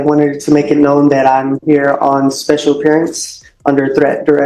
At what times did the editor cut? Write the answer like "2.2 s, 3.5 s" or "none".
none